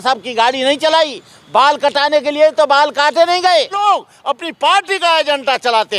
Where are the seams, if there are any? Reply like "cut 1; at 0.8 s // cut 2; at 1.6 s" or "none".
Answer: cut 1; at 3.8 s